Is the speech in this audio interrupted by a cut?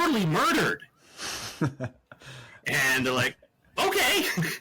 no; 0 cuts

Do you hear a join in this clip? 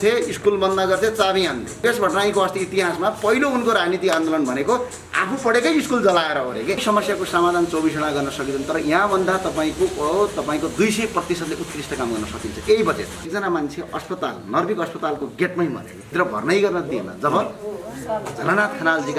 yes; 4 cuts; at 1.8 s, 6.8 s, 13.3 s, 16.1 s

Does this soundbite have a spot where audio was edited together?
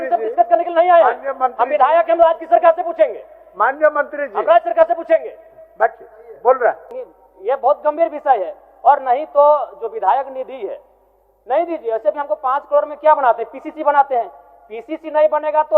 yes; 1 cut; at 6.9 s

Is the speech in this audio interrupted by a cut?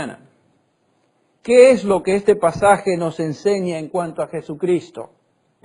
yes; 1 cut; at 3.6 s

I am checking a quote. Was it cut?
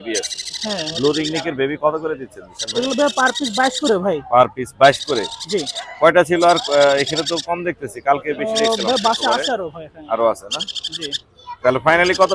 no; 0 cuts

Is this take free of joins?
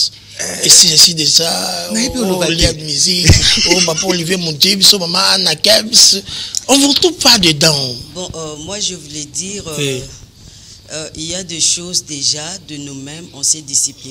yes; 0 cuts

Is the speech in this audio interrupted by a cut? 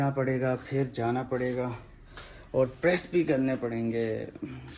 no; 0 cuts

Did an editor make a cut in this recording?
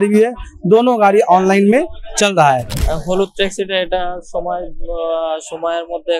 yes; 1 cut; at 2.7 s

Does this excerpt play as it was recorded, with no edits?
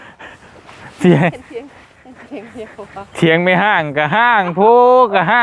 yes; 0 cuts

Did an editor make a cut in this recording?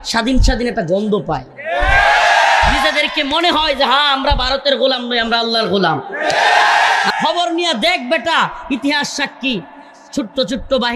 yes; 1 cut; at 7.1 s

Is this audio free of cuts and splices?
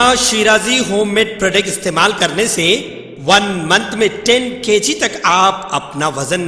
yes; 0 cuts

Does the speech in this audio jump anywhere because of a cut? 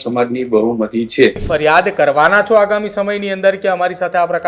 yes; 1 cut; at 1.4 s

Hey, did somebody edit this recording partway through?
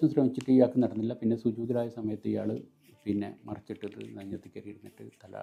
no; 0 cuts

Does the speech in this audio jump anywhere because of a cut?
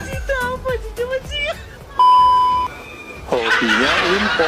no; 0 cuts

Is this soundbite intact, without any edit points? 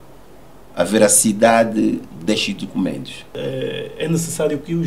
no; 1 cut; at 3.3 s

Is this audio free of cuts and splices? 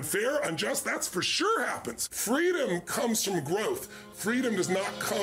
no; 1 cut; at 2.1 s

